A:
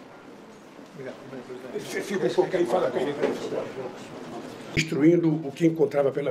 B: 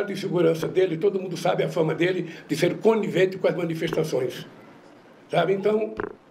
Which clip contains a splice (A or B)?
A